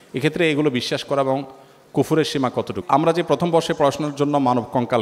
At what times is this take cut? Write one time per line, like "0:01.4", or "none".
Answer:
0:02.8